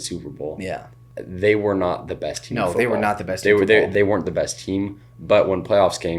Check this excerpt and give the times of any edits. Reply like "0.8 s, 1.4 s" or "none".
1.0 s, 3.9 s